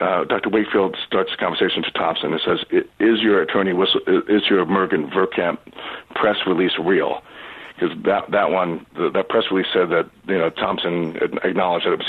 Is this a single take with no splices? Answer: yes; 0 cuts

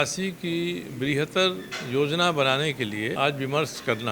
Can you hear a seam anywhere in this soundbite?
yes; 1 cut; at 3.2 s

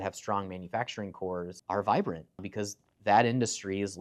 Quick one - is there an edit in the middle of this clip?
yes; 2 cuts; at 1.6 s, 2.5 s

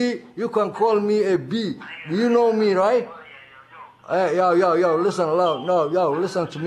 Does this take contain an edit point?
no; 0 cuts

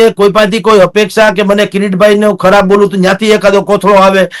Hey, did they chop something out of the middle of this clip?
no; 0 cuts

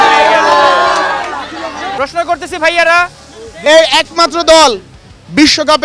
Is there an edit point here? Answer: no; 0 cuts

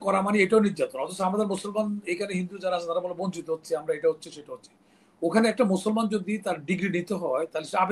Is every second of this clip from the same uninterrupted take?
yes; 0 cuts

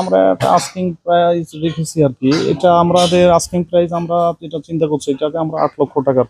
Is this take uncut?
yes; 0 cuts

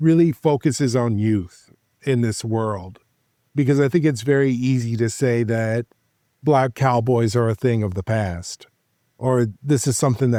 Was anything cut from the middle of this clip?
no; 0 cuts

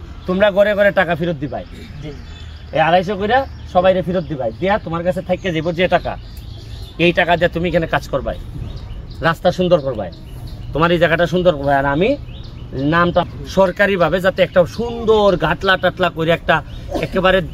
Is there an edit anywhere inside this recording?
yes; 1 cut; at 13.2 s

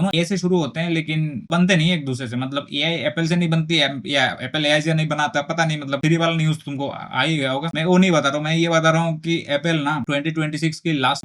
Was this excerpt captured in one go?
yes; 0 cuts

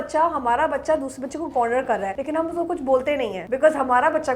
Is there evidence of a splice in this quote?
yes; 2 cuts; at 2.2 s, 3.4 s

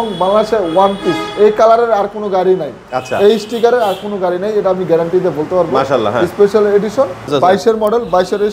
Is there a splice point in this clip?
yes; 1 cut; at 7.3 s

